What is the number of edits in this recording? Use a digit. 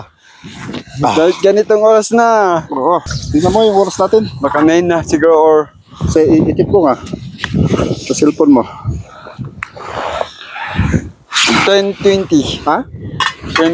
1